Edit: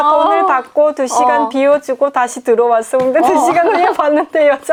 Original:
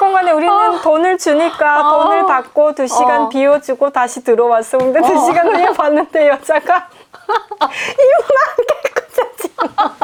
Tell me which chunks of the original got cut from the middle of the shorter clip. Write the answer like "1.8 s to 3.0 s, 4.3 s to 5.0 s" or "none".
none